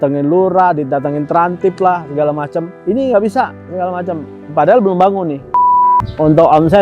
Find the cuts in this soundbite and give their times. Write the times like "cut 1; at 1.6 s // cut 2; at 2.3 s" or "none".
cut 1; at 2.7 s // cut 2; at 5.6 s